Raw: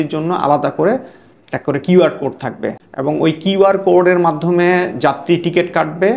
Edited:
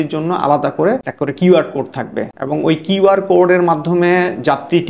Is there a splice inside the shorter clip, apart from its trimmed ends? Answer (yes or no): yes